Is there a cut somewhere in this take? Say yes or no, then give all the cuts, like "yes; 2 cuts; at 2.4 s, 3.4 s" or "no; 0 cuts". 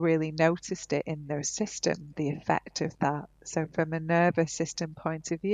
no; 0 cuts